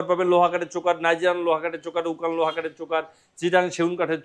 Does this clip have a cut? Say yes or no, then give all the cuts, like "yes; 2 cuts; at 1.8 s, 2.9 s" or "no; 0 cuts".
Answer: no; 0 cuts